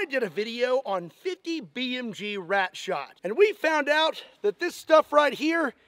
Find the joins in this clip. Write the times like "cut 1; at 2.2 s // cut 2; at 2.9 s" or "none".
cut 1; at 3.1 s